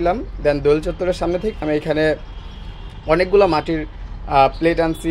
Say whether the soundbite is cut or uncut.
uncut